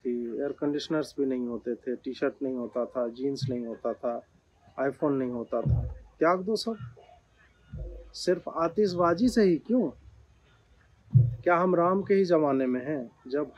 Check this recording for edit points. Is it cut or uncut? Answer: uncut